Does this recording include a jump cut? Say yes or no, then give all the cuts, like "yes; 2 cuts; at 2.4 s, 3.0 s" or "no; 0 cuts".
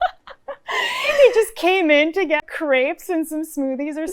yes; 1 cut; at 2.4 s